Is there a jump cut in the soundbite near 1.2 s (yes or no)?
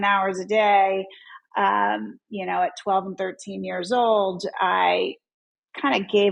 no